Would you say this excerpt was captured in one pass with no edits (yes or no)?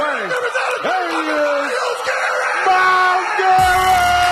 yes